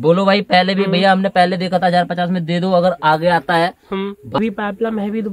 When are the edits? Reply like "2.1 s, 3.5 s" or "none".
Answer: 4.4 s